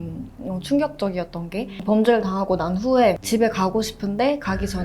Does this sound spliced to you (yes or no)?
yes